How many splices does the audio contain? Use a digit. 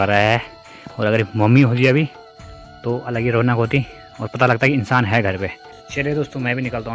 0